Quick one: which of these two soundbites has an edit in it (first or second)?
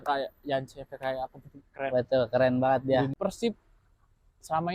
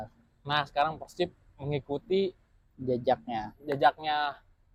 first